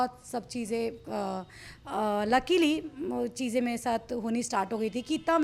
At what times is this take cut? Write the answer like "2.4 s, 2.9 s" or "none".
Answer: none